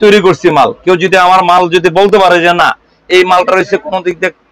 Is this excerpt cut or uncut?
uncut